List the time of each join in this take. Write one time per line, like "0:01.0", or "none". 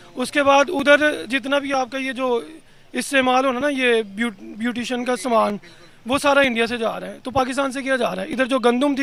none